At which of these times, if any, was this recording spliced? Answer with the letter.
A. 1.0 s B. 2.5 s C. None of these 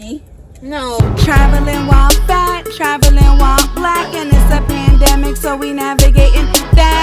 A